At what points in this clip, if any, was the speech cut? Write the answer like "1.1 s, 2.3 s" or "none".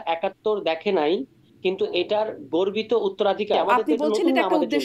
3.6 s